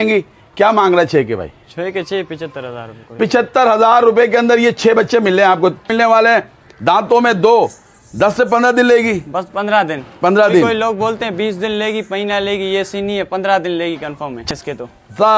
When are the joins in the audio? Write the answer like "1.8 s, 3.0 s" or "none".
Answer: 5.9 s, 14.4 s